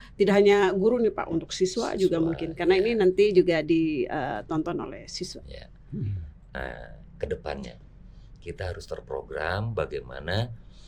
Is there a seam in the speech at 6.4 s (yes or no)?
yes